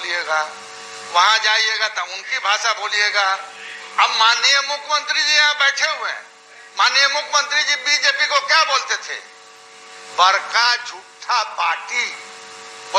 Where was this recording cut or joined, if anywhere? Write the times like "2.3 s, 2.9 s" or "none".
none